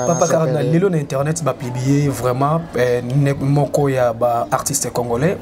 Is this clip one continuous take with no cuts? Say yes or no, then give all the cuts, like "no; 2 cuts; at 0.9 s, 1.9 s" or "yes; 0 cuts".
yes; 0 cuts